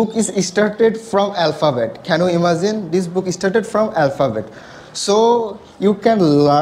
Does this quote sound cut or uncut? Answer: uncut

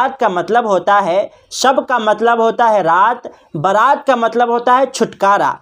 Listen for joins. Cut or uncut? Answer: uncut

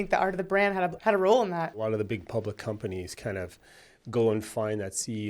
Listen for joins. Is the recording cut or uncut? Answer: cut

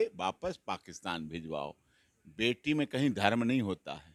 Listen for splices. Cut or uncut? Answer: uncut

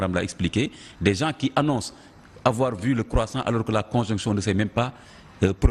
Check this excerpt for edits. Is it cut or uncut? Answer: cut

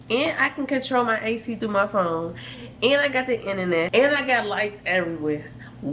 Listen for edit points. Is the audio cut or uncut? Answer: cut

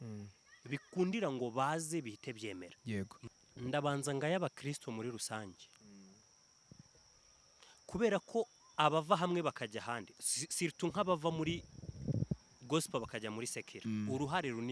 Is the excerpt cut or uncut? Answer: cut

